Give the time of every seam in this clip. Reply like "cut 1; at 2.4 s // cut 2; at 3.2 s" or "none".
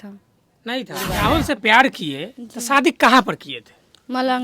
cut 1; at 1.0 s